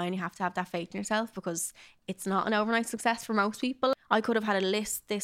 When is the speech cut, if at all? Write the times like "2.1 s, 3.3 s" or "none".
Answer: 3.9 s